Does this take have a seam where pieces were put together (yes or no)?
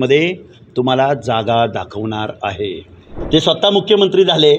yes